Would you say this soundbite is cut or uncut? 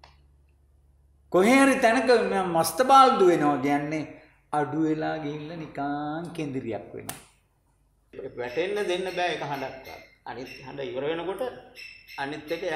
cut